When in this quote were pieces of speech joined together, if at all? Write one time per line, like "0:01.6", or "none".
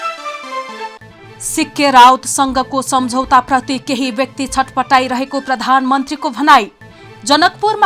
0:00.9